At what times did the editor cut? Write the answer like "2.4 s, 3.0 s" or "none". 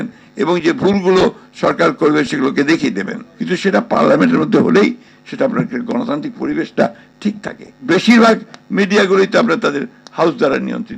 7.7 s